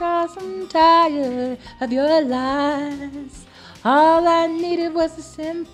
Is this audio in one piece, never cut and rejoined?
yes; 0 cuts

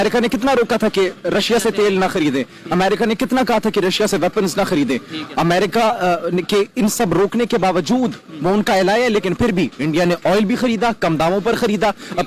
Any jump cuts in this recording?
no; 0 cuts

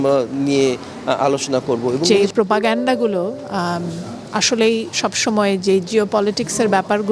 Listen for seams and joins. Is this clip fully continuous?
no; 1 cut; at 2.1 s

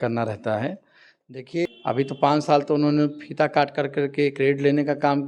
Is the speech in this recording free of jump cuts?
no; 1 cut; at 1.7 s

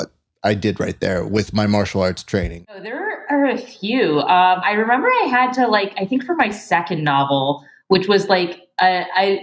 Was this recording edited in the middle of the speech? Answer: yes; 1 cut; at 2.8 s

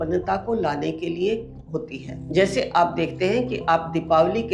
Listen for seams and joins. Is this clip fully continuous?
no; 1 cut; at 2.0 s

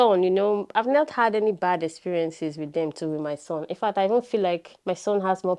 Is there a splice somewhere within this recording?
no; 0 cuts

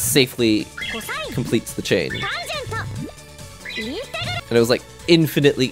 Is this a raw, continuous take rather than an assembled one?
no; 1 cut; at 4.4 s

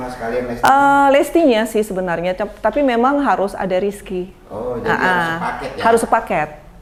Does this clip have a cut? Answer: no; 0 cuts

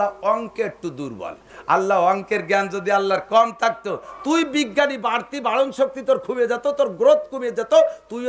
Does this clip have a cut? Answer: yes; 2 cuts; at 1.5 s, 4.1 s

